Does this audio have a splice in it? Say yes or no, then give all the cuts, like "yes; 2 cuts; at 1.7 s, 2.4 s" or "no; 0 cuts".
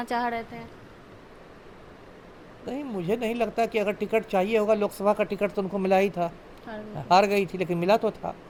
no; 0 cuts